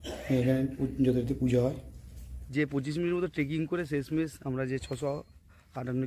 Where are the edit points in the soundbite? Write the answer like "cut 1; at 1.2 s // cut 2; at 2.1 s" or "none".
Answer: none